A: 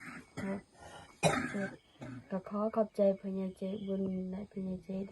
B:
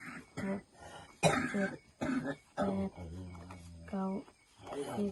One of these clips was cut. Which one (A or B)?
A